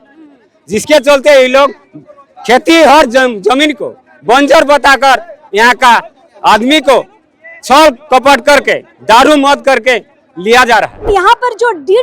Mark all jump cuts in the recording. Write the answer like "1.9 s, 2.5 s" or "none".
11.1 s